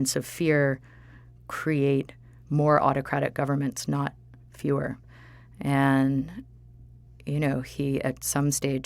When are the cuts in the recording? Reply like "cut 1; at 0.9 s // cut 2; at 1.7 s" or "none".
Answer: cut 1; at 5.5 s